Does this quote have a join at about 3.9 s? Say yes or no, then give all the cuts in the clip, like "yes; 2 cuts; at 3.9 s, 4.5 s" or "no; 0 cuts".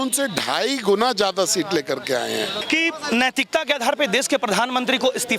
no; 1 cut; at 2.6 s